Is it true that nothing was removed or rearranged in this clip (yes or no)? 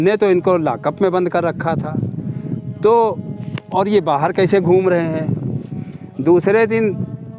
yes